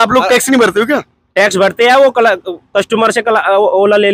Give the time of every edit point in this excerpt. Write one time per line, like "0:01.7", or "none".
none